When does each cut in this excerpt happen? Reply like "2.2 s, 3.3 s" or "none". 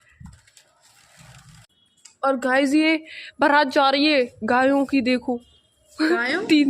1.7 s